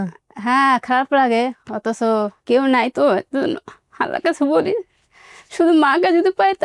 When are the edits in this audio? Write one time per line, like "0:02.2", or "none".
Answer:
0:02.4